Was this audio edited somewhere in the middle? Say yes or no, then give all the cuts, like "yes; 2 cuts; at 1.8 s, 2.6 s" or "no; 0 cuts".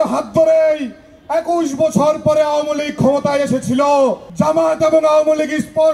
yes; 1 cut; at 4.2 s